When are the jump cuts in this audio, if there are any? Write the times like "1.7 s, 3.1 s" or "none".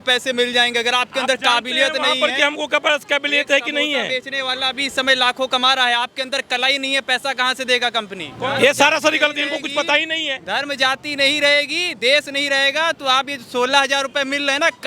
8.2 s